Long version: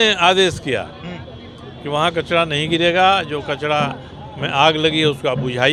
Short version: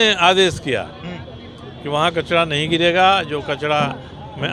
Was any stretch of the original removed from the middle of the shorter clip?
no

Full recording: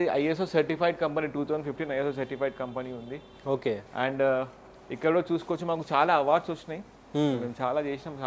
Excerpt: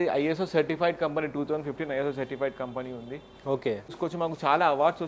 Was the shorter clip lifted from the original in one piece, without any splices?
no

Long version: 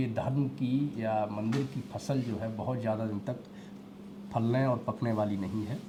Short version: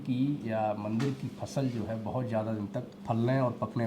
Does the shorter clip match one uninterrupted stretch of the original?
no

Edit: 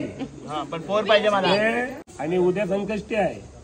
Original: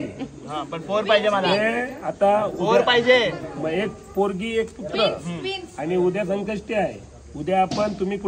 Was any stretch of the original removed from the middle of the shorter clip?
yes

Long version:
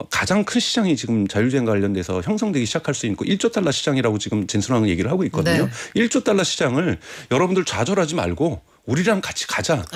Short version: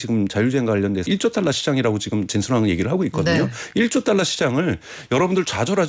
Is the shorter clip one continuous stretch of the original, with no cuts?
no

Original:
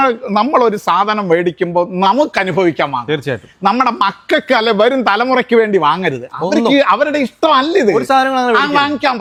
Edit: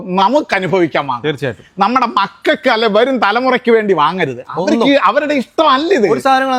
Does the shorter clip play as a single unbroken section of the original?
yes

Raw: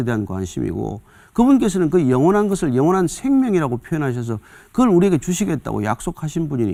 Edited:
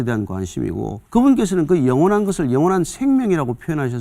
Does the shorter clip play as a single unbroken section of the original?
no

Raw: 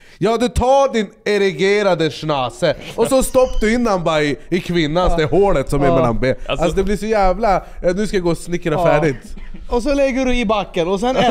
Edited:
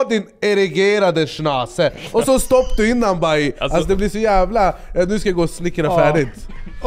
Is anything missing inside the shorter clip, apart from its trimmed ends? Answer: yes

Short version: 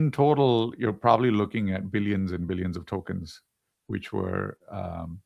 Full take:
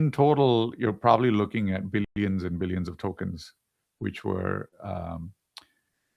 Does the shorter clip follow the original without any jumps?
no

